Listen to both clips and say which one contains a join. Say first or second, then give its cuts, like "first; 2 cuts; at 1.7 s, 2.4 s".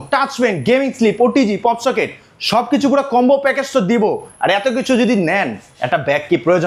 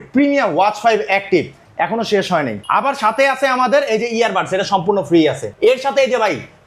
second; 3 cuts; at 1.6 s, 2.6 s, 5.5 s